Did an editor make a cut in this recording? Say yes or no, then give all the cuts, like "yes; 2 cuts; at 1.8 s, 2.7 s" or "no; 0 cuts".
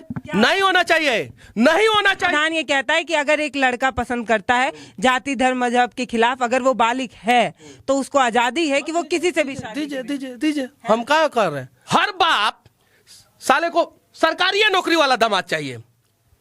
yes; 2 cuts; at 2.3 s, 11.7 s